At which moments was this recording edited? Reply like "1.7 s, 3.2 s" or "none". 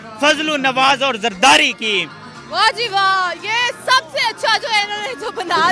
none